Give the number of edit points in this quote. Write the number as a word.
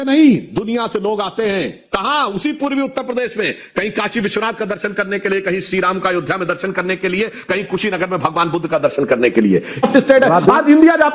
one